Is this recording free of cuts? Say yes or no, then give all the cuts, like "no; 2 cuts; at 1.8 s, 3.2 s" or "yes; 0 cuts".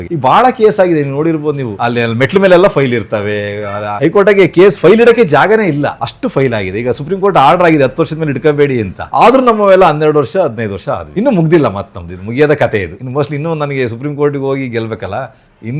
yes; 0 cuts